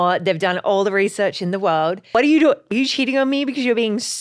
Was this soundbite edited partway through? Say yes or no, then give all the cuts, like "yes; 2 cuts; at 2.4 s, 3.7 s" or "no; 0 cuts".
yes; 2 cuts; at 2.0 s, 2.6 s